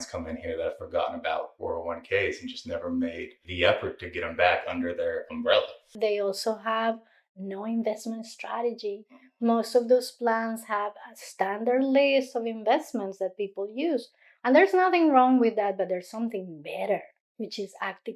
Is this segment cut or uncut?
cut